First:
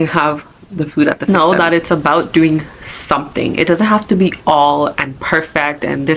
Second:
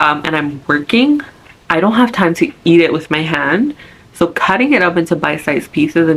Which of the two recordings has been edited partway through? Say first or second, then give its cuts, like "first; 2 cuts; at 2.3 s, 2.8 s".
first; 1 cut; at 1.6 s